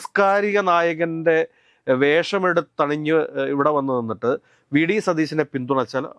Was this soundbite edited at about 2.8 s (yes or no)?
no